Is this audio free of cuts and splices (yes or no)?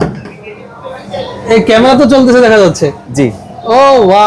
yes